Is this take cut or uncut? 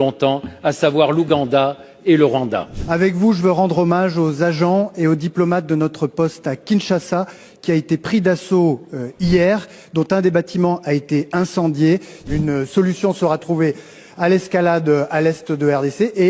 cut